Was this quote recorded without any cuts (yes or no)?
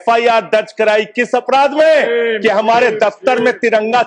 yes